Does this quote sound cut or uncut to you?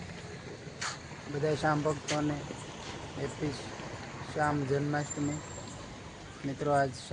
uncut